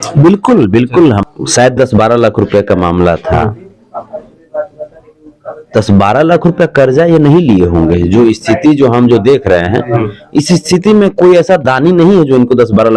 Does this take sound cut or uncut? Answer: cut